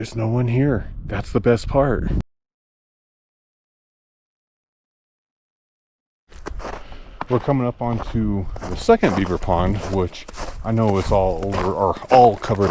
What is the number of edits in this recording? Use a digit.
0